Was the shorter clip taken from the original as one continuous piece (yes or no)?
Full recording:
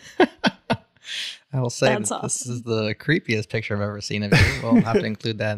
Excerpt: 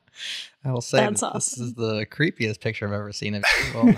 yes